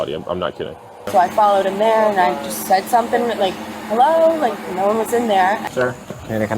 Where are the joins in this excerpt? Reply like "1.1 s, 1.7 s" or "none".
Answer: 0.9 s, 5.6 s